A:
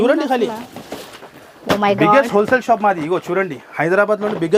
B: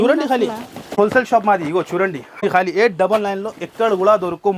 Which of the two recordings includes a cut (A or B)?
B